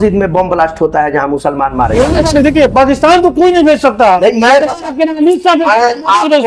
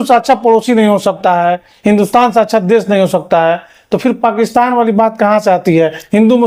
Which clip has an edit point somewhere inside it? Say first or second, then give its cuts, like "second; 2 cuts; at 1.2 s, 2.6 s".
first; 1 cut; at 2.0 s